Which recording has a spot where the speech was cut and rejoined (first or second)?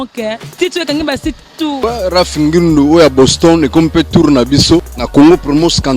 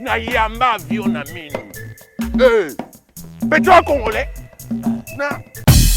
first